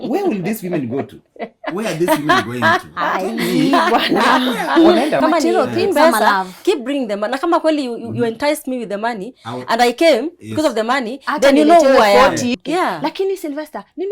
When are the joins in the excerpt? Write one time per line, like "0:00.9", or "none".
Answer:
0:05.2
0:12.5